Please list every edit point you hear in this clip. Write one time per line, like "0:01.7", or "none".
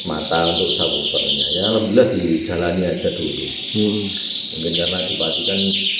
none